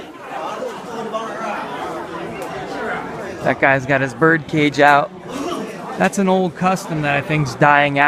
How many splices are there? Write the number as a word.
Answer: one